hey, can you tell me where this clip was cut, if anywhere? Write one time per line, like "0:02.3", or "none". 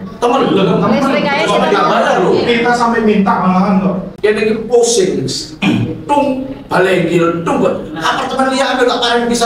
0:04.1